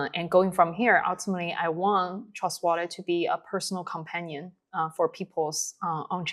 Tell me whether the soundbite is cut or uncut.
uncut